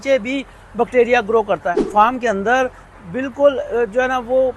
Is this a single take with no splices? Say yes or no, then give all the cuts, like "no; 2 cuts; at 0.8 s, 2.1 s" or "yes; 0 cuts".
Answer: no; 1 cut; at 1.8 s